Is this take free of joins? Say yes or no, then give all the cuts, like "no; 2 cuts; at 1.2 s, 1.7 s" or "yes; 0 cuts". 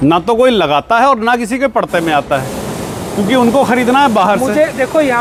yes; 0 cuts